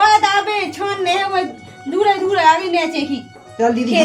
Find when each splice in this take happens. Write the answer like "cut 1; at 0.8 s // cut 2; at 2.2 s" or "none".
none